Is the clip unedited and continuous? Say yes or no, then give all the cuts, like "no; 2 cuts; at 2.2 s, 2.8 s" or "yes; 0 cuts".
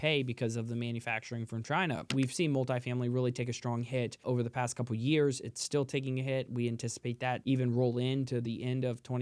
no; 3 cuts; at 2.1 s, 4.2 s, 7.4 s